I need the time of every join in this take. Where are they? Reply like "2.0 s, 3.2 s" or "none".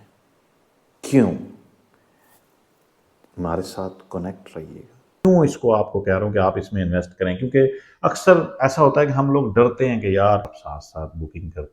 5.2 s, 10.6 s

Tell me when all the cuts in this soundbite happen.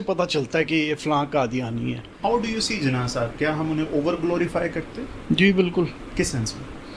2.1 s, 6.0 s

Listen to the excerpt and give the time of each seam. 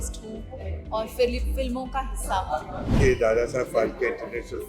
2.9 s

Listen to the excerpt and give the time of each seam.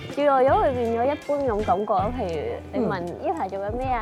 none

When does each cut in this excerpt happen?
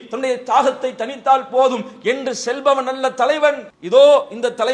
3.7 s

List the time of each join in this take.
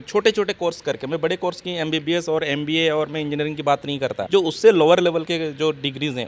4.2 s

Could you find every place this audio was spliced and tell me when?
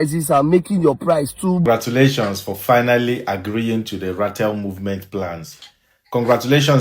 1.6 s

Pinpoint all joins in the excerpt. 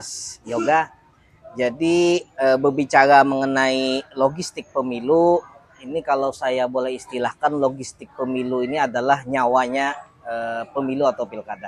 none

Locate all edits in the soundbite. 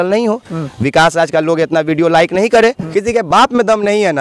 2.8 s

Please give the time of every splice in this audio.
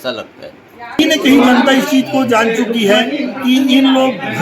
1.0 s

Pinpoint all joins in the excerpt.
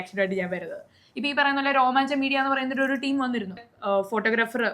3.6 s

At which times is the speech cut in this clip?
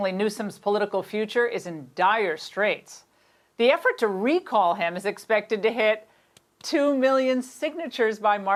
none

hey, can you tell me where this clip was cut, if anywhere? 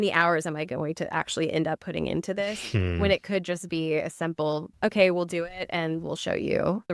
none

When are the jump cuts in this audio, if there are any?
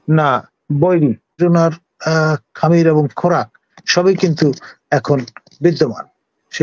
1.4 s

